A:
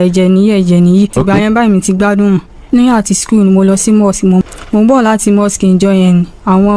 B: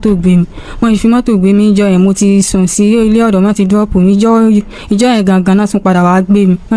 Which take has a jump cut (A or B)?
A